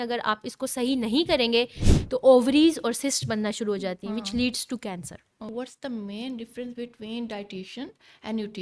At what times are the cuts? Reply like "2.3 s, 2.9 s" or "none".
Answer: 5.5 s